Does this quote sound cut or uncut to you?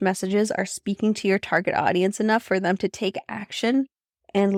uncut